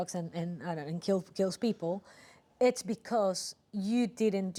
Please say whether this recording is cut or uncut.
uncut